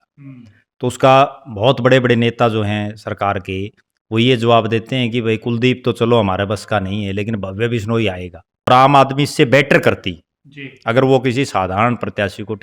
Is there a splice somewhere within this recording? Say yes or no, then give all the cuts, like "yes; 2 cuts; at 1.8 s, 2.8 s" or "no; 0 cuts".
yes; 1 cut; at 8.7 s